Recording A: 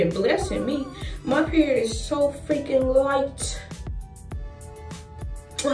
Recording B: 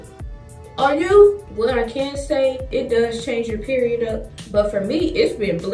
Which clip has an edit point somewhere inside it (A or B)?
B